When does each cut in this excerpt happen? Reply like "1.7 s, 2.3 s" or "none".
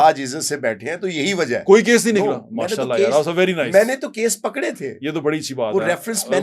none